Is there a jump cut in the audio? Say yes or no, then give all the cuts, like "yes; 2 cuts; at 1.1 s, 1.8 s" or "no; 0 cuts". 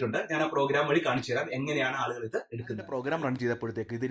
yes; 1 cut; at 3.0 s